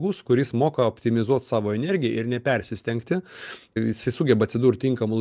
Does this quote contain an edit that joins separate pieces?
yes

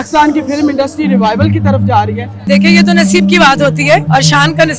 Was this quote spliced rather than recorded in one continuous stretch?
yes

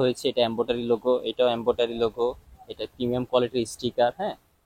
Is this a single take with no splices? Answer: yes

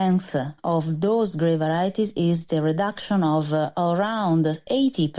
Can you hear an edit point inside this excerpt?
no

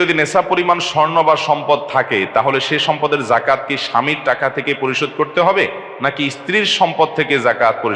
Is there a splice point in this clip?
no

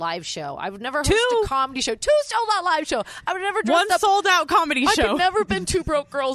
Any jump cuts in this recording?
no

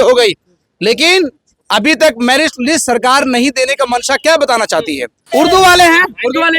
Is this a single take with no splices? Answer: no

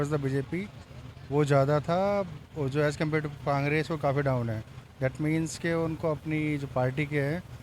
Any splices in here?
no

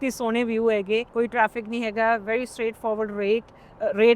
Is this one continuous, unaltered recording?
no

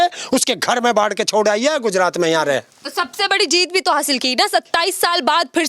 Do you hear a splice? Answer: no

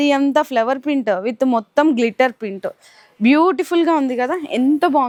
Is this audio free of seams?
yes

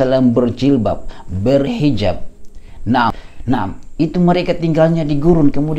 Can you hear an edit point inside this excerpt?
yes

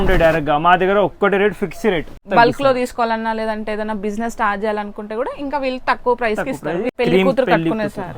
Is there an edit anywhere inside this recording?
yes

